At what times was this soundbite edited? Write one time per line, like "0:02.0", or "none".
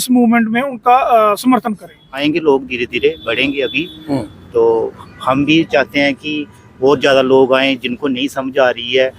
0:02.2